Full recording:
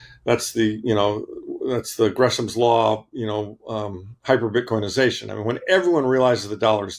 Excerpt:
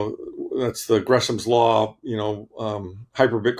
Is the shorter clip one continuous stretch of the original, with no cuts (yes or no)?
yes